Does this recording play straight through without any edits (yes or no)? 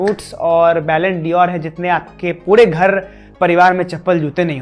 yes